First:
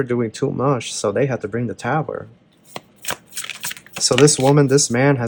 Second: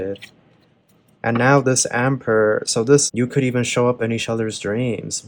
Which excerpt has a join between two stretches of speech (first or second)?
second